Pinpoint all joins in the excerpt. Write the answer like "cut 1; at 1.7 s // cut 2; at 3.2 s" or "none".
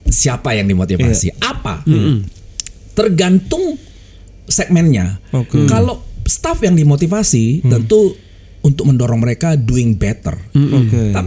none